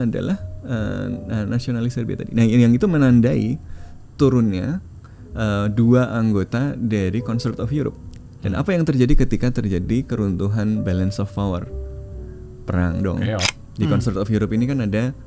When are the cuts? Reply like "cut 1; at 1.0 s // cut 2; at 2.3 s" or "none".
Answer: cut 1; at 13.5 s